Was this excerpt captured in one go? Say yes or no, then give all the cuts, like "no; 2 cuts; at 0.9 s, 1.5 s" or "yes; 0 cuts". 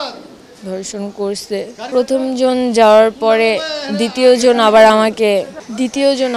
no; 1 cut; at 1.8 s